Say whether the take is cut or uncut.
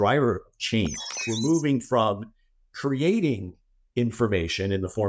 cut